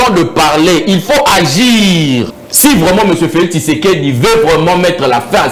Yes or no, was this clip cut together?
yes